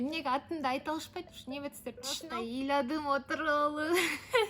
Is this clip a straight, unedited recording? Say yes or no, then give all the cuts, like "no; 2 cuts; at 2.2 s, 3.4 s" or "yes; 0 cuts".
no; 1 cut; at 2.2 s